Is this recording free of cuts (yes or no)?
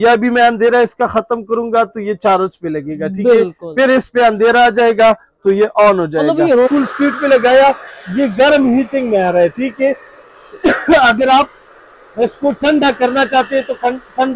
no